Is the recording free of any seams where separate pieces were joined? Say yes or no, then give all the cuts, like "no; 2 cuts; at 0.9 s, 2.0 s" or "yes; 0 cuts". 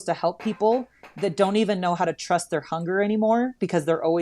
yes; 0 cuts